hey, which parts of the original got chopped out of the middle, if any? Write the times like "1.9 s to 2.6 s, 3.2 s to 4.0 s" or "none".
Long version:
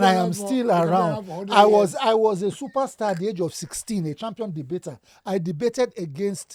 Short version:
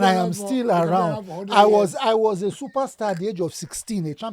none